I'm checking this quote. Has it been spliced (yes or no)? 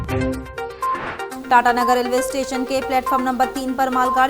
yes